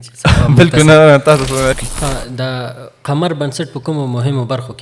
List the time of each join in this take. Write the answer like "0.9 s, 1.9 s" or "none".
1.8 s